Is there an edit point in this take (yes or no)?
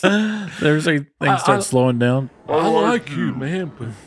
no